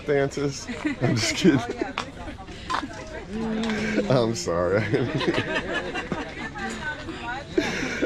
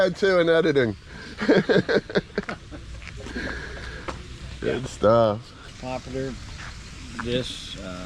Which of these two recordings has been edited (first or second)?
second